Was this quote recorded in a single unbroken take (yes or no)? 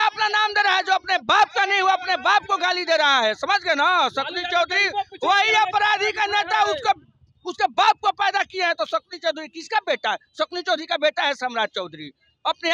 yes